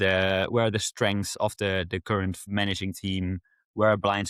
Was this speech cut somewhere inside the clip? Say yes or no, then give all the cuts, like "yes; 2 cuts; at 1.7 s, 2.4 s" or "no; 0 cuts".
no; 0 cuts